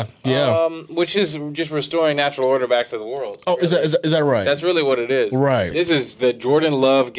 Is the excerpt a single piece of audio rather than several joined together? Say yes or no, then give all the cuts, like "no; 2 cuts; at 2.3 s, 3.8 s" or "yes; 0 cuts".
no; 1 cut; at 5.7 s